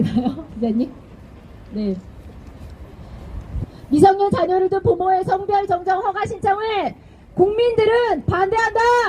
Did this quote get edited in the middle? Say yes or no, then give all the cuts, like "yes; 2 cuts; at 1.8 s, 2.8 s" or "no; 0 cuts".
no; 0 cuts